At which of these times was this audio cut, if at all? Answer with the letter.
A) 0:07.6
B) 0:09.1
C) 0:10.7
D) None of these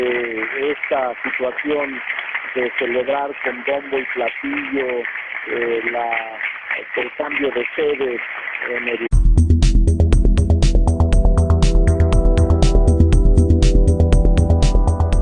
D